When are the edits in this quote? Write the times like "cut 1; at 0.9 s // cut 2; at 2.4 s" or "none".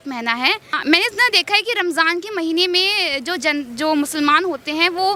none